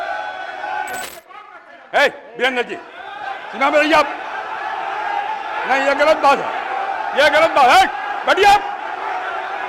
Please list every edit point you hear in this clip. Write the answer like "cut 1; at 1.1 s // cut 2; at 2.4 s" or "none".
cut 1; at 1.1 s